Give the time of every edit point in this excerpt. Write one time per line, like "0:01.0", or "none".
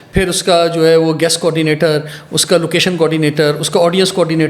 none